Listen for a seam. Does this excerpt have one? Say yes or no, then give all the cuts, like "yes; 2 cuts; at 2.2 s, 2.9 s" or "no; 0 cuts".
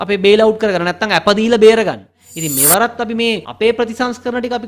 yes; 2 cuts; at 2.2 s, 3.5 s